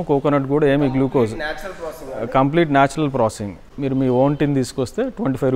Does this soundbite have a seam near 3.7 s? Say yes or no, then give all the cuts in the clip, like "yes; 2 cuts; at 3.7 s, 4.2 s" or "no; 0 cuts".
yes; 1 cut; at 3.7 s